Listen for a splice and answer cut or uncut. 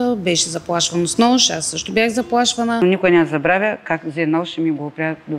cut